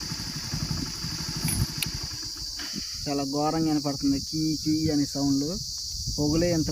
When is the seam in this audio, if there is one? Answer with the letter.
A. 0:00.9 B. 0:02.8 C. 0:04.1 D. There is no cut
D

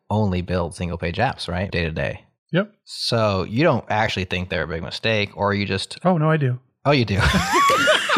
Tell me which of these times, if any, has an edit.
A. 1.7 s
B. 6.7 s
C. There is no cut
A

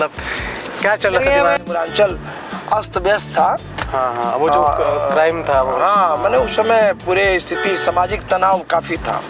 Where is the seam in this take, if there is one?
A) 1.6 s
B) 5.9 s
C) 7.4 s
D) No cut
A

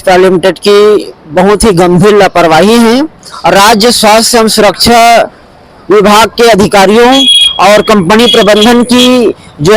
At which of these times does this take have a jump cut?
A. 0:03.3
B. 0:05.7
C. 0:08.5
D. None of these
A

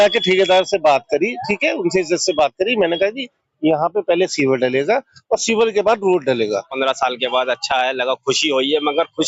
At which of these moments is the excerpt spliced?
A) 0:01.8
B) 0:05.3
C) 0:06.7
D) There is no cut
C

